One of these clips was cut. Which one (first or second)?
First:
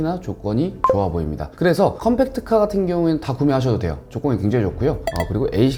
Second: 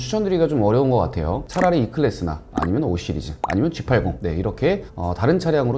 second